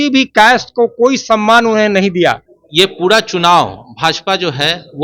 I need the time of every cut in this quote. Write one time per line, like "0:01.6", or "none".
0:02.5